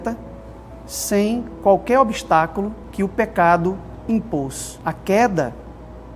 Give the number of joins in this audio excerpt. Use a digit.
2